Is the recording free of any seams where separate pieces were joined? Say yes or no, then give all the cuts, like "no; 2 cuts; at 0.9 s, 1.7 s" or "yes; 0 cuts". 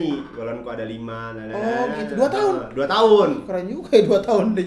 yes; 0 cuts